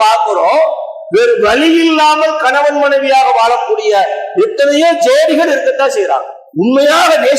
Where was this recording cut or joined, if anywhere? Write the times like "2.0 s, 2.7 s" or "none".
6.3 s

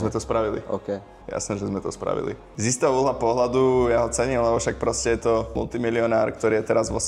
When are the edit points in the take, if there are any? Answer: 2.5 s, 5.5 s

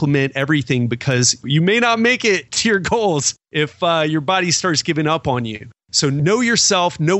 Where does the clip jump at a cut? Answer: none

